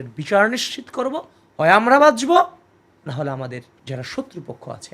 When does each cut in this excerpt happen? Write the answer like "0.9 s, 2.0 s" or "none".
3.7 s